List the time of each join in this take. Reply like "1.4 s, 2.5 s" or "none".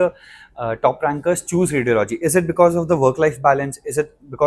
none

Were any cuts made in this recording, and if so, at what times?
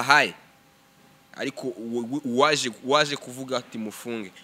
1.2 s

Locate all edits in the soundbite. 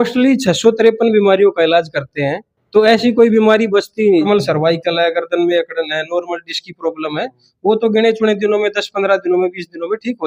4.3 s

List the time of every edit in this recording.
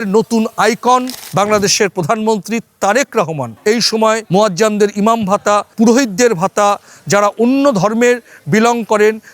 1.3 s, 4.2 s

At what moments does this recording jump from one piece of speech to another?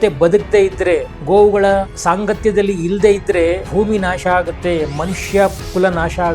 1.1 s, 1.9 s, 3.6 s

